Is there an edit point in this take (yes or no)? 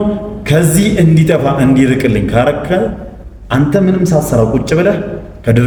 no